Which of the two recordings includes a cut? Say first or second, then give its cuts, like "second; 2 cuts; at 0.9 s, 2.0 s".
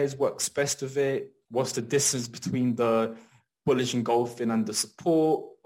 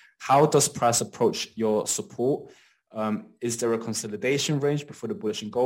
first; 1 cut; at 1.4 s